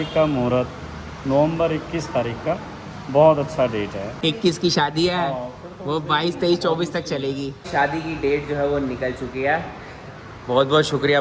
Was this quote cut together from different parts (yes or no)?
yes